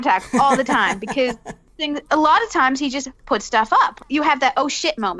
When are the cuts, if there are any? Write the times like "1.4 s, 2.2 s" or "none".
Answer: 1.8 s, 4.0 s